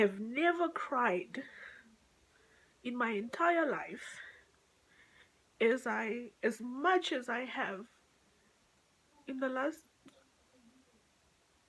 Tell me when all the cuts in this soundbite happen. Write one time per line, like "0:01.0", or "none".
none